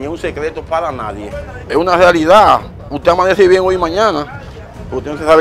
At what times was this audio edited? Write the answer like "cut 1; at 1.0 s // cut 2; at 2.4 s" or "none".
cut 1; at 1.5 s